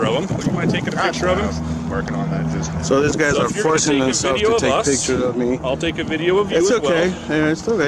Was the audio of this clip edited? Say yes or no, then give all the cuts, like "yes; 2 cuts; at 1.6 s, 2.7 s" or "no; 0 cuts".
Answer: no; 0 cuts